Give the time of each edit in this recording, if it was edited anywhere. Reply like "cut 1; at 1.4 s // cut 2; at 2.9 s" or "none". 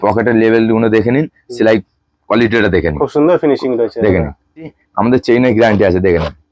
cut 1; at 4.8 s